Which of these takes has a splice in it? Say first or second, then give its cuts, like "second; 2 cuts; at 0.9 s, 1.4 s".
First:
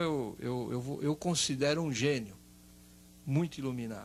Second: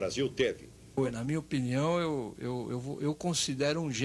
second; 1 cut; at 1.0 s